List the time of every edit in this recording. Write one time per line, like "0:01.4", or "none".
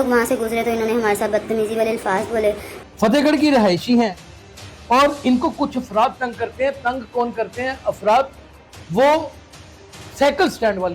0:02.7